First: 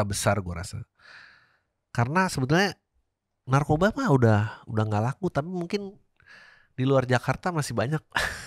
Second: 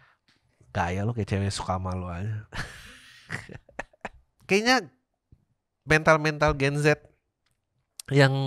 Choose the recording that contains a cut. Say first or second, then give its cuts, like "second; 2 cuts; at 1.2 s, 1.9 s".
second; 1 cut; at 4.3 s